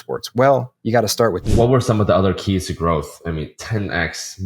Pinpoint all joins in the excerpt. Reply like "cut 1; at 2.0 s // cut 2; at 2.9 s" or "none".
cut 1; at 1.4 s